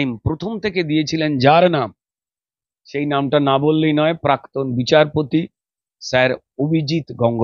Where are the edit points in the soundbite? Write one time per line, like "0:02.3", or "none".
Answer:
none